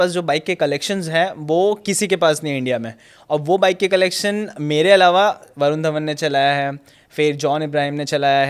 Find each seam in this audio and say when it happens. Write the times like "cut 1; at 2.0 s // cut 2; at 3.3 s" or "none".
none